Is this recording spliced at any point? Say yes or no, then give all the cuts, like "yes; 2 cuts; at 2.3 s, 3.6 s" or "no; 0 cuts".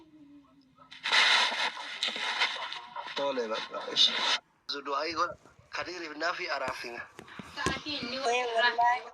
yes; 1 cut; at 4.6 s